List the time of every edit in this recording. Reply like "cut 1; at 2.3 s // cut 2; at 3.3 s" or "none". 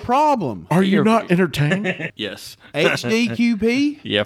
cut 1; at 2.0 s

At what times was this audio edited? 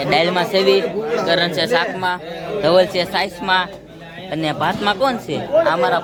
none

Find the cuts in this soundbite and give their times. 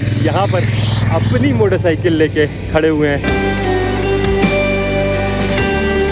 cut 1; at 3.2 s

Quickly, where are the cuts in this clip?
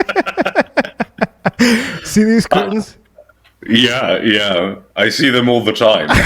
none

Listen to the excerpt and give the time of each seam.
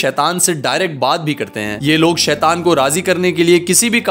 cut 1; at 1.8 s

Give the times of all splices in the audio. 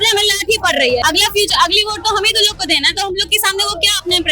cut 1; at 1.0 s

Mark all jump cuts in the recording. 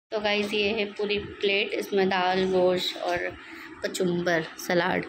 none

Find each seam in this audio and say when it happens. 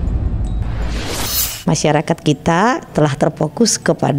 cut 1; at 1.6 s

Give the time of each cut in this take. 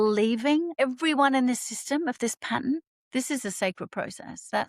cut 1; at 0.8 s // cut 2; at 2.9 s

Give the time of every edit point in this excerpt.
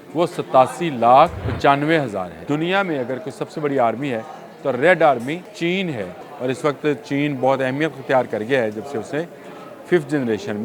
cut 1; at 1.4 s // cut 2; at 2.4 s // cut 3; at 5.5 s // cut 4; at 6.2 s

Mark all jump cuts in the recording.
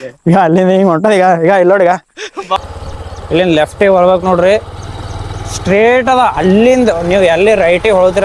cut 1; at 2.6 s

